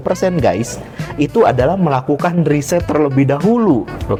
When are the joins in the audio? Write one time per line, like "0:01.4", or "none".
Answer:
none